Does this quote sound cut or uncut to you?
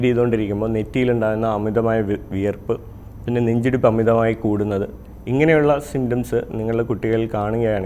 uncut